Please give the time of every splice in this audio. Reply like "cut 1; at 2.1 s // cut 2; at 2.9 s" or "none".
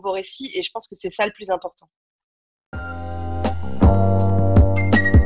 cut 1; at 2.8 s